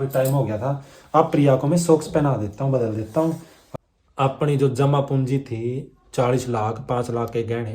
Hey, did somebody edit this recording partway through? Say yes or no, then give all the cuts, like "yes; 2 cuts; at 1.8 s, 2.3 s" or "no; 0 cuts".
yes; 1 cut; at 3.5 s